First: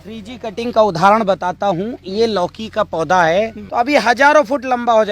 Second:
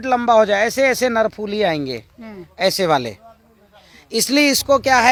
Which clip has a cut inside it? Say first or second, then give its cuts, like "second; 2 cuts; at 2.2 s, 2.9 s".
first; 1 cut; at 3.6 s